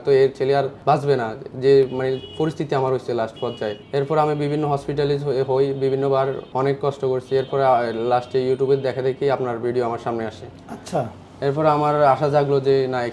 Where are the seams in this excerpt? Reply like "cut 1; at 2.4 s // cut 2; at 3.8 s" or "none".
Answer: none